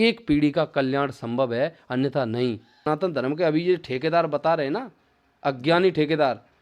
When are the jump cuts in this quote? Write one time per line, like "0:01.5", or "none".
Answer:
0:02.9

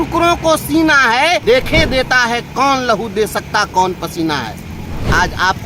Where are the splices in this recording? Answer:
0:01.4

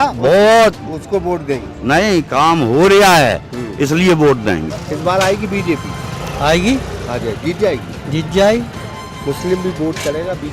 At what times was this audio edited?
0:04.8

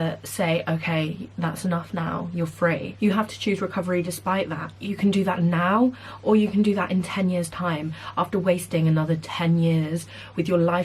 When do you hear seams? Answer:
0:02.9

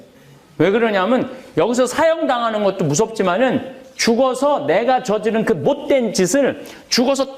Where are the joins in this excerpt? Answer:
none

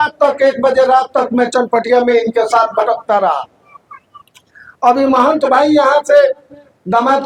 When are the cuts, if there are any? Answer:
none

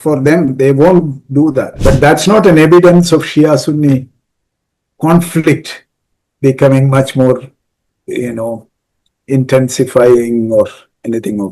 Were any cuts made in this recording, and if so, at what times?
0:01.7

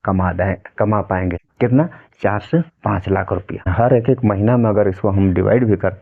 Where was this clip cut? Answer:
0:01.4
0:03.7

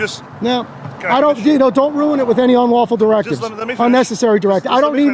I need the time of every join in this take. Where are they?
none

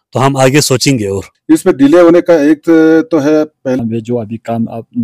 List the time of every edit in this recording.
0:01.3
0:03.8

